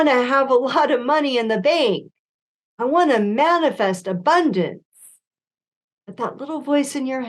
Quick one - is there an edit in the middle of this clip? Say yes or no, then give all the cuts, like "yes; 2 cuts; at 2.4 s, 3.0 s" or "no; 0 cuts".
no; 0 cuts